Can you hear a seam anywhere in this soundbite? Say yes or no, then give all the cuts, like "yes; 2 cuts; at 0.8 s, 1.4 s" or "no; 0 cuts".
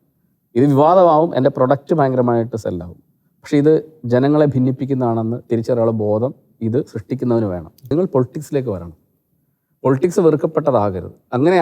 yes; 1 cut; at 7.9 s